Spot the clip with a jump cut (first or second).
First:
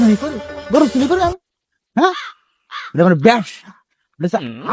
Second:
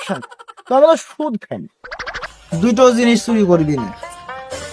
second